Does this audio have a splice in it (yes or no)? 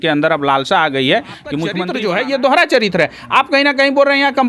yes